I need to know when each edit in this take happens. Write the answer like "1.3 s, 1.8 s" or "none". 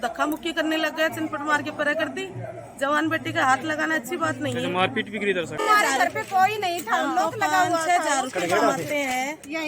5.6 s